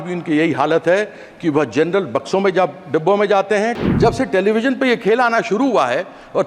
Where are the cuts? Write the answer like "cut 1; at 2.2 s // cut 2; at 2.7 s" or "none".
cut 1; at 3.8 s